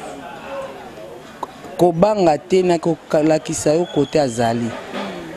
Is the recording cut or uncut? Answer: uncut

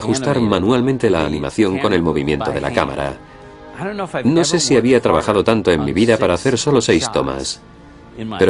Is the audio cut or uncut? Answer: uncut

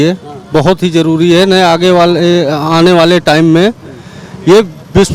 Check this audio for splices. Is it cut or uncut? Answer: uncut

